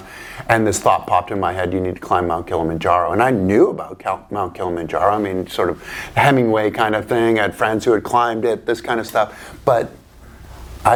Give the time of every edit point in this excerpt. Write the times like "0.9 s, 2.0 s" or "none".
none